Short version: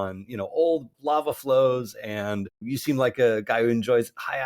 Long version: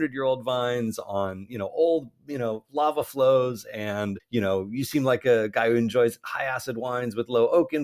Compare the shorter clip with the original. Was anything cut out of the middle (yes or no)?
yes